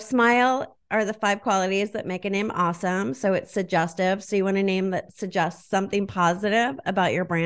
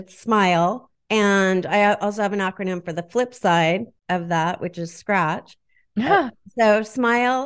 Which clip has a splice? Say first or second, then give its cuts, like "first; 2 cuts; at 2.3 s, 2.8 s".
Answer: second; 2 cuts; at 0.9 s, 3.9 s